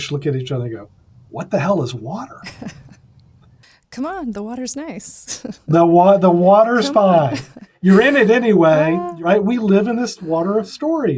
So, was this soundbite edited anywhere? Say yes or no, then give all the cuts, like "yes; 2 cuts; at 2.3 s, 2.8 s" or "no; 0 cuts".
yes; 4 cuts; at 3.4 s, 7.7 s, 9.1 s, 10.2 s